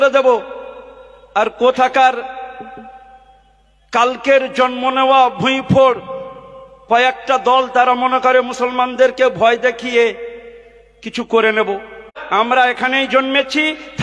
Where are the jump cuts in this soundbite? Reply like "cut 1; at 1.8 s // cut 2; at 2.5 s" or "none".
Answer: cut 1; at 12.1 s